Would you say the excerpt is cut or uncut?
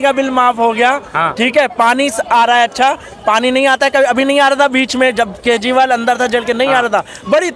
uncut